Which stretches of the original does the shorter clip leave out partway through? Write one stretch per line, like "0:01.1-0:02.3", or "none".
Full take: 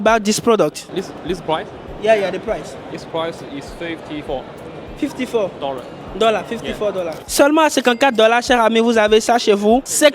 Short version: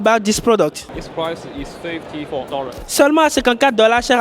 0:00.8-0:02.8
0:04.8-0:07.2